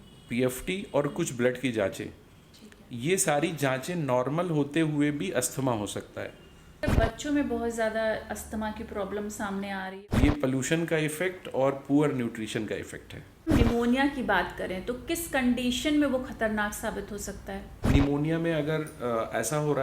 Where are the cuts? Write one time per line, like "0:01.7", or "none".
0:06.8
0:09.9
0:13.5
0:17.7